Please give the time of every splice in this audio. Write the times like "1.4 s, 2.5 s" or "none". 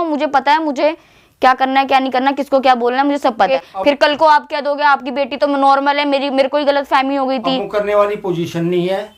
3.5 s

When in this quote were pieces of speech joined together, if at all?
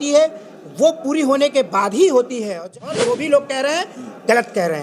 2.9 s

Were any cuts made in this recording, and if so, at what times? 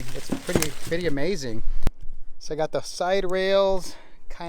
1.9 s

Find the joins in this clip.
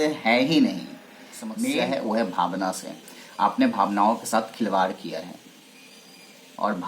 1.7 s

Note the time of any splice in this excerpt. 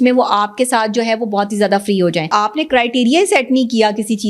2.3 s

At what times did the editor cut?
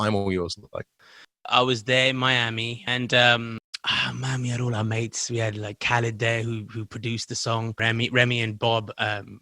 1.1 s, 2.8 s, 7.8 s

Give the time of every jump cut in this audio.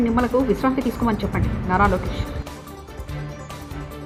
none

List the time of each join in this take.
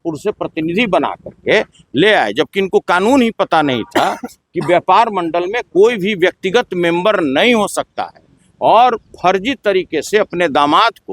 none

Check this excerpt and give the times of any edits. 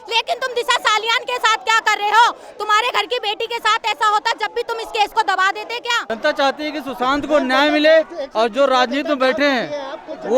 6.0 s

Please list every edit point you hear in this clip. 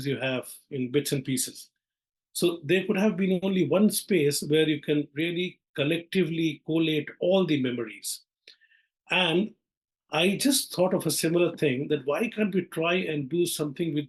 none

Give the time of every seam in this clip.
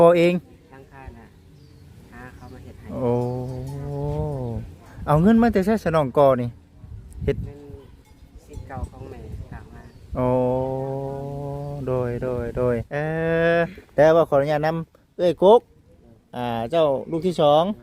12.9 s

